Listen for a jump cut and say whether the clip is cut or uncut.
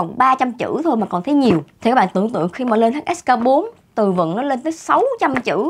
uncut